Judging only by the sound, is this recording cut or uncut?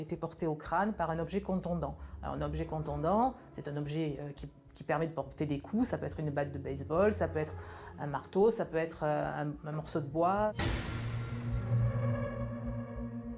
uncut